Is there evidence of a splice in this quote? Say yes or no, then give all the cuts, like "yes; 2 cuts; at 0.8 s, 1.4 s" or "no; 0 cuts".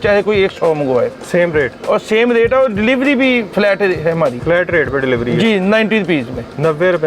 yes; 2 cuts; at 3.5 s, 4.4 s